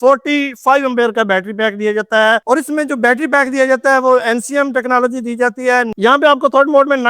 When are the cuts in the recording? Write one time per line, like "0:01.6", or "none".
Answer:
0:05.9